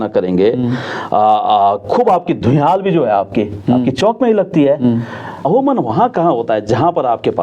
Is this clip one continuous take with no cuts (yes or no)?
no